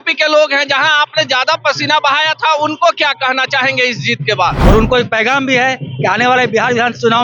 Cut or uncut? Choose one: cut